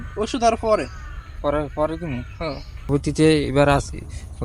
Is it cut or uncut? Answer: cut